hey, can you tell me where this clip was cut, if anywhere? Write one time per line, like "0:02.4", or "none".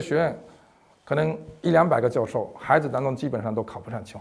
none